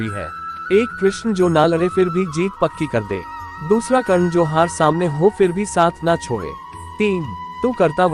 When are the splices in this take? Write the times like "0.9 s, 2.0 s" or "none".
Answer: 7.1 s